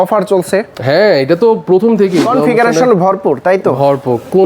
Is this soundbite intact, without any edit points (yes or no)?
no